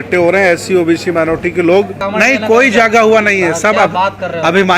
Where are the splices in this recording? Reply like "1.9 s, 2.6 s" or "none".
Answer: 2.0 s